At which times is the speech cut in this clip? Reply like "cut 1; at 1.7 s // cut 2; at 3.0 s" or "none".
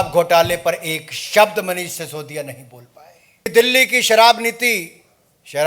cut 1; at 3.5 s